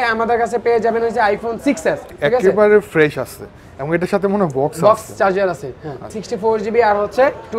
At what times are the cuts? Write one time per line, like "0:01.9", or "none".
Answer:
0:02.2
0:06.2